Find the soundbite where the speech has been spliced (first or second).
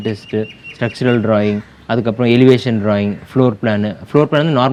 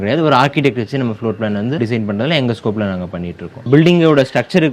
second